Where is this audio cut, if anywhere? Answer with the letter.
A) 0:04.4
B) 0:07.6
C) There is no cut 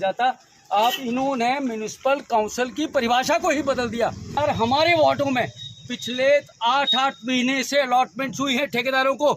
A